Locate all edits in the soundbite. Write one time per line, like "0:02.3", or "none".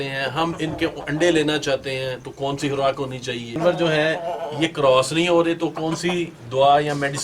0:03.6